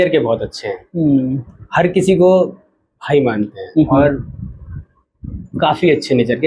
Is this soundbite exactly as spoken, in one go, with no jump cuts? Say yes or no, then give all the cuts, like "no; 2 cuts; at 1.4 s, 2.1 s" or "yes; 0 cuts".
yes; 0 cuts